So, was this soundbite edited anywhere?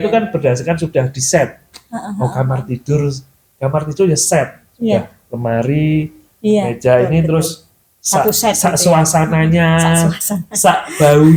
no; 0 cuts

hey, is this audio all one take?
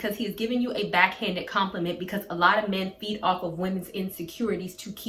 yes; 0 cuts

